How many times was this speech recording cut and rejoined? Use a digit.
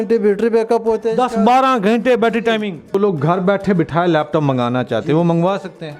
1